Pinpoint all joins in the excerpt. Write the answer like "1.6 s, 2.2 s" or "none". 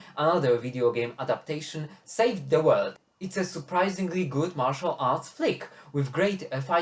3.1 s